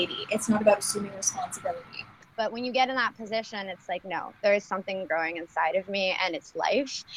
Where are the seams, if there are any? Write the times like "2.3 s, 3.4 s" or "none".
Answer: 2.2 s